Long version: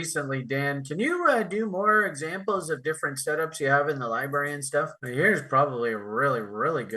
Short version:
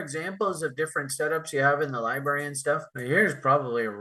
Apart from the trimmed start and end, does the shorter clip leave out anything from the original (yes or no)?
no